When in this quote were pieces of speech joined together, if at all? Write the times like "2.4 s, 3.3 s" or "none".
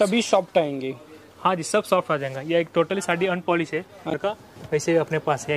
4.1 s